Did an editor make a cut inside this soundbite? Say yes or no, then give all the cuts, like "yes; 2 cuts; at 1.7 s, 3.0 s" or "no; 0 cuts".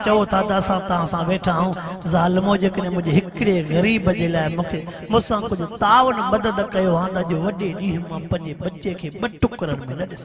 no; 0 cuts